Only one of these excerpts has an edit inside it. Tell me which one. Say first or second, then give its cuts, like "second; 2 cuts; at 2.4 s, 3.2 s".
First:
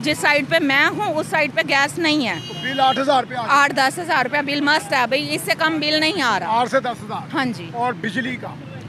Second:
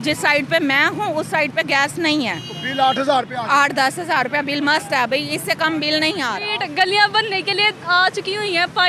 second; 1 cut; at 6.4 s